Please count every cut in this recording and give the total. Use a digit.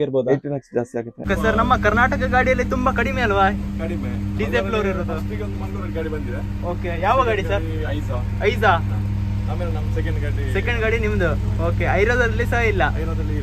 1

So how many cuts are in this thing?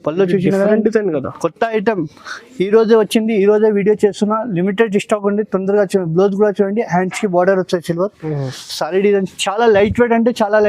0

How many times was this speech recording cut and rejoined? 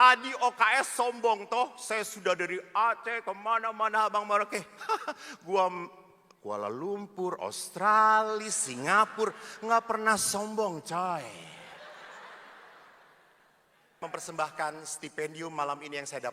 1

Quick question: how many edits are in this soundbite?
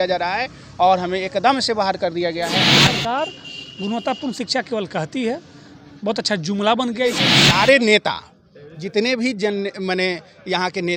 2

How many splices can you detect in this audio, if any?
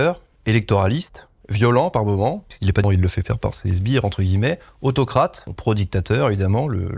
1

